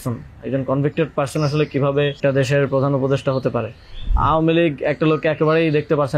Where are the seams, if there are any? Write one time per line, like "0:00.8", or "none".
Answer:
0:02.2
0:04.1